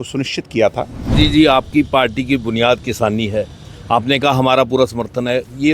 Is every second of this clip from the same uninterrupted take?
no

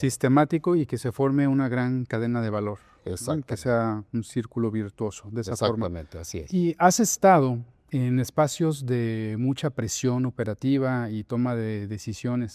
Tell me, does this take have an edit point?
no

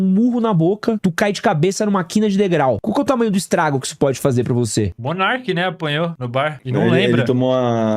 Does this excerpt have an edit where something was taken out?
yes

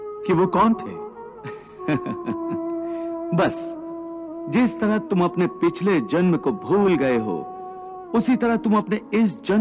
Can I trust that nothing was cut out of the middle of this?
yes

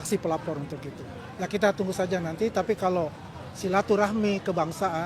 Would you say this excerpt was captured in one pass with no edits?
yes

